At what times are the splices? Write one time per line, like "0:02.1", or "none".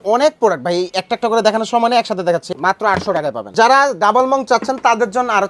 0:02.5
0:03.5